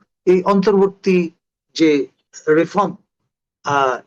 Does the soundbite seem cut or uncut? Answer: cut